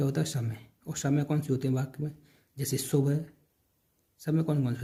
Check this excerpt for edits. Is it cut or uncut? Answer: uncut